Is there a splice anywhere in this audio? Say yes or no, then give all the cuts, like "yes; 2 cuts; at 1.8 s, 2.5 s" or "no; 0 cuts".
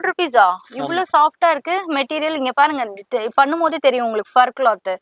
no; 0 cuts